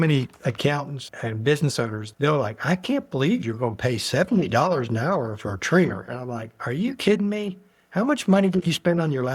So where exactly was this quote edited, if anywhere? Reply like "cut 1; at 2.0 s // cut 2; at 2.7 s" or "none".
none